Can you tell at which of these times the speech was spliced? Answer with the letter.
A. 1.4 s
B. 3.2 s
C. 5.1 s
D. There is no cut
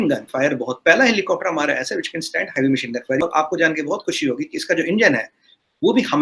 B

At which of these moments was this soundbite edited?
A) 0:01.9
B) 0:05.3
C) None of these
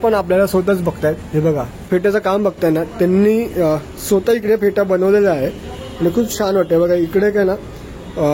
A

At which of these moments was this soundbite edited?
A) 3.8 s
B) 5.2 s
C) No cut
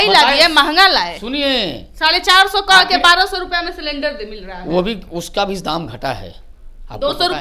C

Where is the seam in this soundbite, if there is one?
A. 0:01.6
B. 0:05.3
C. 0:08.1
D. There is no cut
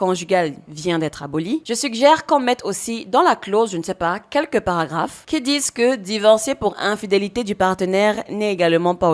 A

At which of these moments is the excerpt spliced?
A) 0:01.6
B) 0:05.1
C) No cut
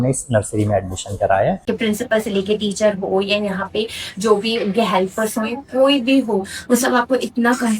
A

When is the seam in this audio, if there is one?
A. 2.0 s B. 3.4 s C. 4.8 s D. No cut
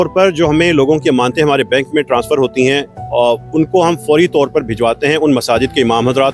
D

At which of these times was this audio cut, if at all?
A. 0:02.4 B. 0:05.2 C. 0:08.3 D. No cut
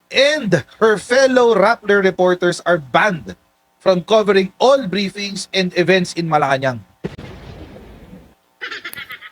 C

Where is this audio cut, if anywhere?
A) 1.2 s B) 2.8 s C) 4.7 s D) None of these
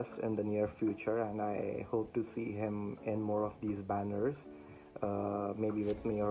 D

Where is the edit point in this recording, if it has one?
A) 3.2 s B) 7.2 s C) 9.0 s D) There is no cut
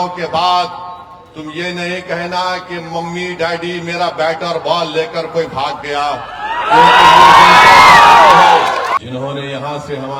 C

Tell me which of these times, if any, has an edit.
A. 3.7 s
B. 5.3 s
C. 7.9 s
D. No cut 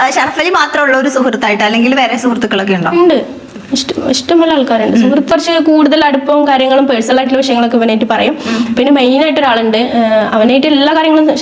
B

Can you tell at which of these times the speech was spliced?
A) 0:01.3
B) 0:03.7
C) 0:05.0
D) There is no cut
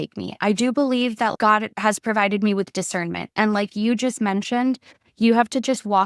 A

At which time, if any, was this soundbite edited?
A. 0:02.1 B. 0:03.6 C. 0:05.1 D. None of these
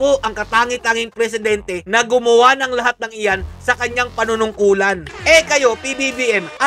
C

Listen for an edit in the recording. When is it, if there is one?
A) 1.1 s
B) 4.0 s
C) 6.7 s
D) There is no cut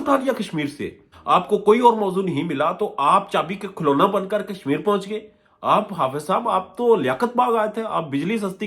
A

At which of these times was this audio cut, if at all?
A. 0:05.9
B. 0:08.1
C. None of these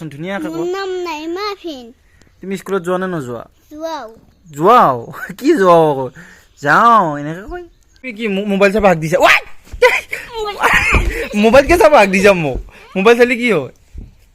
B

